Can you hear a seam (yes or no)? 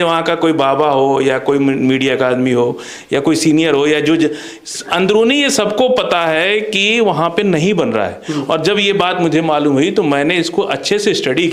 no